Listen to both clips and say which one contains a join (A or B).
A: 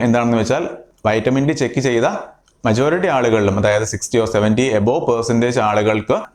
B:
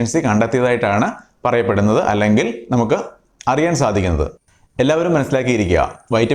B